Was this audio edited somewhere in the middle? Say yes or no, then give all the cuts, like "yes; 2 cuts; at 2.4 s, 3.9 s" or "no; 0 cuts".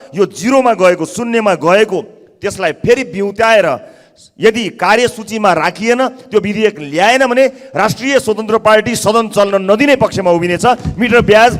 no; 0 cuts